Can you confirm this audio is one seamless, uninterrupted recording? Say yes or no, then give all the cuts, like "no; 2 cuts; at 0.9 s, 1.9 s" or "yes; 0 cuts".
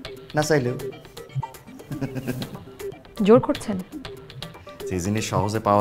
yes; 0 cuts